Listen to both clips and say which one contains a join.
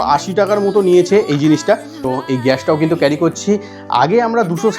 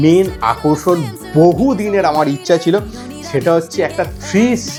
first; 1 cut; at 1.9 s

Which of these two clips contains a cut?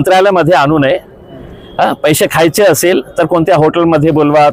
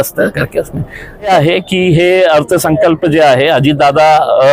second; 1 cut; at 1.3 s

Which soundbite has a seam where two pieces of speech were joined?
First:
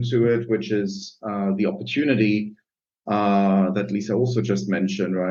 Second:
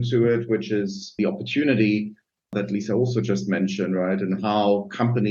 second; 2 cuts; at 1.2 s, 2.5 s

